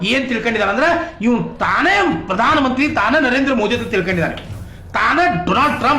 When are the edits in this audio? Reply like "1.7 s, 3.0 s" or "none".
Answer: 2.7 s